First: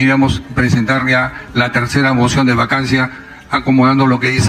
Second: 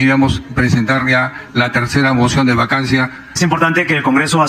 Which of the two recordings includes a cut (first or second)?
second